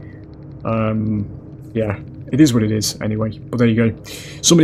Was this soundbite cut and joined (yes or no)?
no